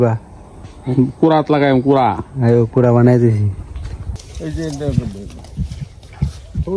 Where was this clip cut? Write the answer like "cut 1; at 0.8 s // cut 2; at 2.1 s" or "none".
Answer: cut 1; at 4.2 s